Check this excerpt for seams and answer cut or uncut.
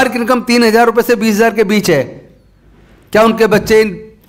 uncut